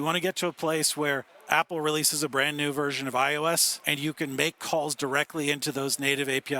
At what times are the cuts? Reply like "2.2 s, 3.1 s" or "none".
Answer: 1.3 s, 3.8 s